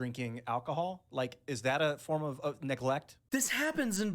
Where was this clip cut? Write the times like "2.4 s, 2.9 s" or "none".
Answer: 3.2 s